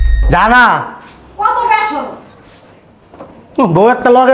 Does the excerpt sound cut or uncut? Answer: uncut